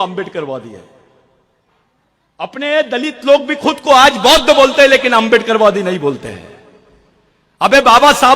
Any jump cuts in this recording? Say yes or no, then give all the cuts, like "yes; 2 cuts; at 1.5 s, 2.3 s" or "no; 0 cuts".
no; 0 cuts